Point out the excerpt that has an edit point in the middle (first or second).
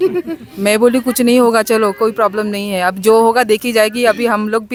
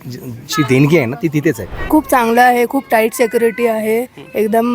second